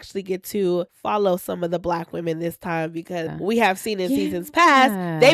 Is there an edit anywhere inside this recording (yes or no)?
yes